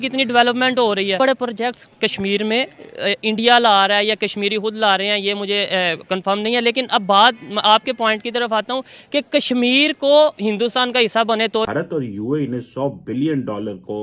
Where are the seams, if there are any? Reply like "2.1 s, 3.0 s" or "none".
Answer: 10.4 s, 11.7 s